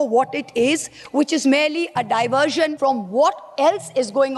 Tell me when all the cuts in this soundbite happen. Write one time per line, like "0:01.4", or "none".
0:02.7